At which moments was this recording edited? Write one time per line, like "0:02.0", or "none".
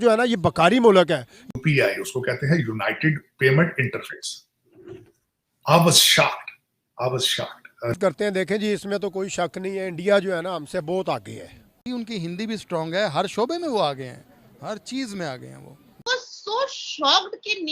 0:01.5
0:07.9
0:11.6
0:16.0